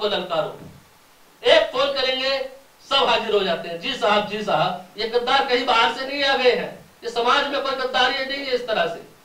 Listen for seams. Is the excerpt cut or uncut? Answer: cut